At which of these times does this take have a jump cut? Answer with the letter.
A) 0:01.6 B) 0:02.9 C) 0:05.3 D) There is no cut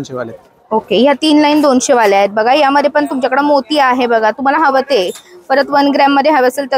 D